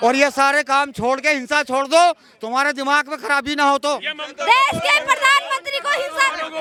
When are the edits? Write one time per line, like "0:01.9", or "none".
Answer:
none